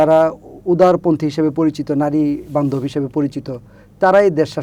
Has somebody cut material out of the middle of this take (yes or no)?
no